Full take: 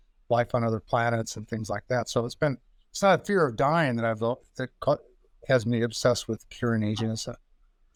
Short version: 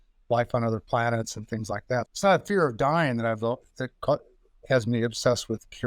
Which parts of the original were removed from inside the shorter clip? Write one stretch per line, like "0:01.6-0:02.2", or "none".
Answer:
0:02.1-0:02.9